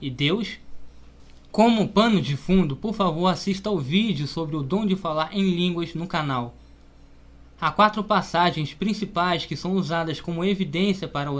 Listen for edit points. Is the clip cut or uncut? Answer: cut